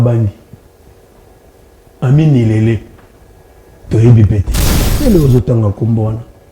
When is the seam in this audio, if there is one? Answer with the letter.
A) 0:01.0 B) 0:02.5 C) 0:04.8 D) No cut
C